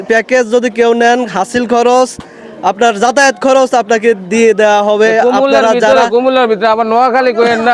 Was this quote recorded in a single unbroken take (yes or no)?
yes